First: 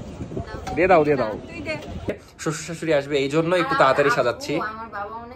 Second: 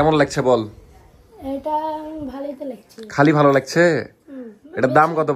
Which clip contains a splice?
first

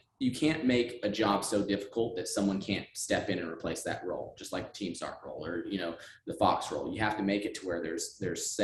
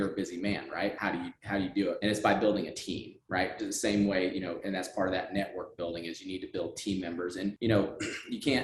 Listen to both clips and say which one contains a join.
second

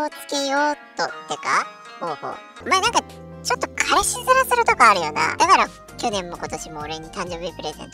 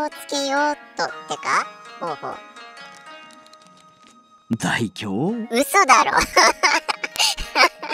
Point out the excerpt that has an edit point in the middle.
first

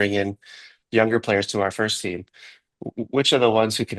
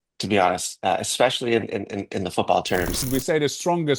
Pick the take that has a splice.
second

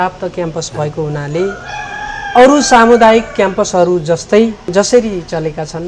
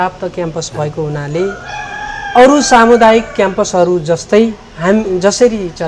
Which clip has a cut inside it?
first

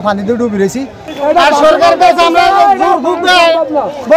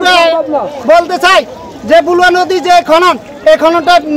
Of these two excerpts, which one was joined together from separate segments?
first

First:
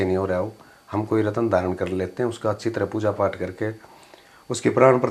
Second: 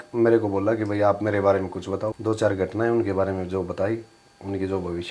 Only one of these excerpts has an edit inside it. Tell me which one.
second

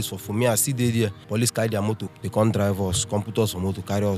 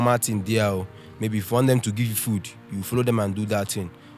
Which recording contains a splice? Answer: first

